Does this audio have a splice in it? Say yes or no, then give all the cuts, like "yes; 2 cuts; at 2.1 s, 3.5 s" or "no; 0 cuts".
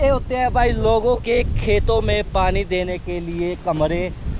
no; 0 cuts